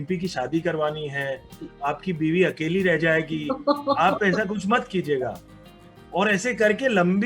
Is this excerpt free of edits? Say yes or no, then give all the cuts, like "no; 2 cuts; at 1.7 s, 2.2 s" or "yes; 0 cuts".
yes; 0 cuts